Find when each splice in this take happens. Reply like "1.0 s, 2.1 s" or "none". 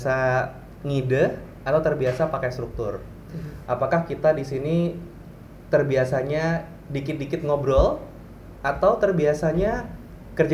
none